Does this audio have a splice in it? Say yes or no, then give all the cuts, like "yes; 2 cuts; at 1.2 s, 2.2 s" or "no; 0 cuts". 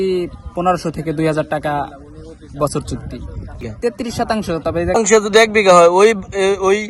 yes; 2 cuts; at 3.6 s, 5.0 s